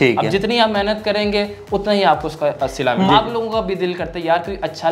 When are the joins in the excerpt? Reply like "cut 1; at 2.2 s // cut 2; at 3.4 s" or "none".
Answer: cut 1; at 3.1 s